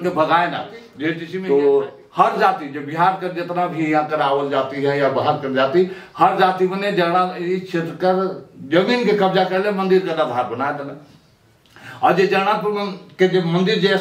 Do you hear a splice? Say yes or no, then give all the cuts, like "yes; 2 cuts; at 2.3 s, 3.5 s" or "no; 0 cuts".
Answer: yes; 1 cut; at 1.3 s